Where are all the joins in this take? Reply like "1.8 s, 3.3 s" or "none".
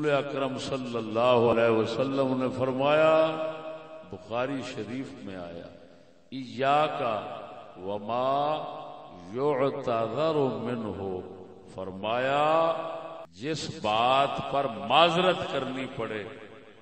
1.5 s